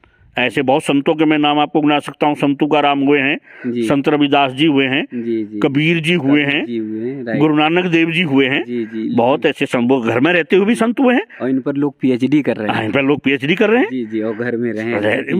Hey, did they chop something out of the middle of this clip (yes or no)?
no